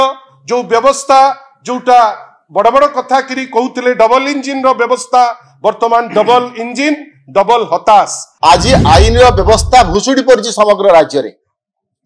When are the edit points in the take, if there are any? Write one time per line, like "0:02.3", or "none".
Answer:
0:08.2